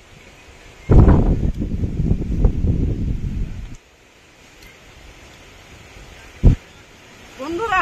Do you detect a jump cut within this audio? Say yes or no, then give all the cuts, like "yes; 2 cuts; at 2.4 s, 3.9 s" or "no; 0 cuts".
no; 0 cuts